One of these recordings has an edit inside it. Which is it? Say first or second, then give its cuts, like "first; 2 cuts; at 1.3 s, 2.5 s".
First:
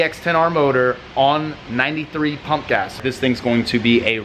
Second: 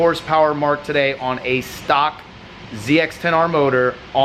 first; 1 cut; at 3.0 s